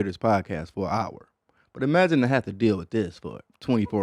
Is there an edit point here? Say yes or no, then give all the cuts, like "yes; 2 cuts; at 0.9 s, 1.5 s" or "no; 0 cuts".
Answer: no; 0 cuts